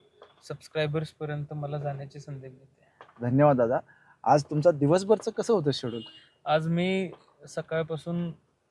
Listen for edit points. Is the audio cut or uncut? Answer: uncut